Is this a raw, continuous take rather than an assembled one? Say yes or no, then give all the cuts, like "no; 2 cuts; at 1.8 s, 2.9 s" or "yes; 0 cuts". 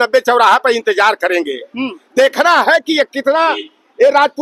yes; 0 cuts